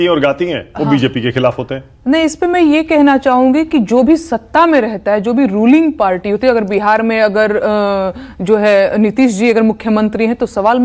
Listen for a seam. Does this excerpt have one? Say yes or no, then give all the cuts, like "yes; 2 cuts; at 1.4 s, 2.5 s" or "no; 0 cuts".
no; 0 cuts